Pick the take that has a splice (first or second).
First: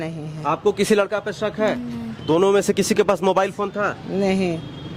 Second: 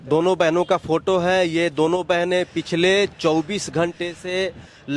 first